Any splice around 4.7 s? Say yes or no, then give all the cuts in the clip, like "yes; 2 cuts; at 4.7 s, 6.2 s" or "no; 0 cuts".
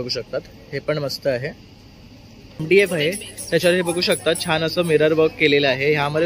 no; 1 cut; at 2.6 s